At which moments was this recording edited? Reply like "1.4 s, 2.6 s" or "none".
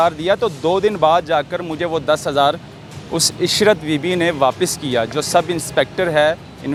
none